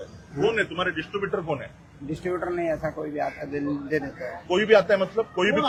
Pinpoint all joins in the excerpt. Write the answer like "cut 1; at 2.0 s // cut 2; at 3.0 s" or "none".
none